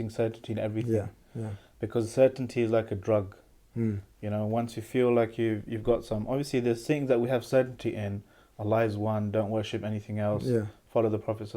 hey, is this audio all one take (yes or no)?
yes